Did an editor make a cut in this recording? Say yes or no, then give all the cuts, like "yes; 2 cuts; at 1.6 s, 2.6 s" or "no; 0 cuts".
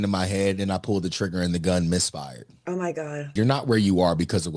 yes; 1 cut; at 3.3 s